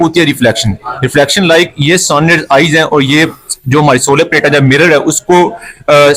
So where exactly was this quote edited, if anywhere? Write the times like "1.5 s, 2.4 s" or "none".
none

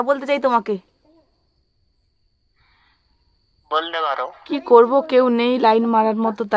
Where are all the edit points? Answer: 4.4 s

